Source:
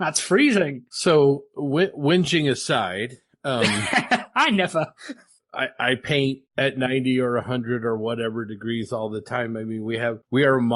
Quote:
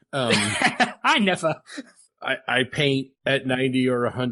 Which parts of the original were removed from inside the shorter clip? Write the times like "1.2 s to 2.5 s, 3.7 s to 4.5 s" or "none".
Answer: none